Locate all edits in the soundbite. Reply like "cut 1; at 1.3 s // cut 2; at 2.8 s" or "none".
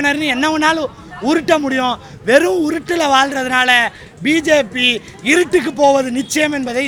none